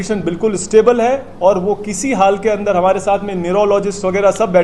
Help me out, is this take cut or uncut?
uncut